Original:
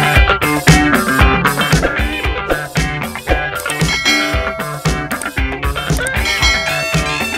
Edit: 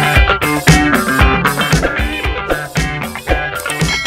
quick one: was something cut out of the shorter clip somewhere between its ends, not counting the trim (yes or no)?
no